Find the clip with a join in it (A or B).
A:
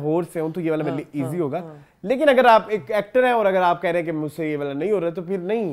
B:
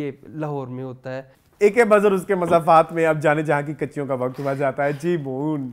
B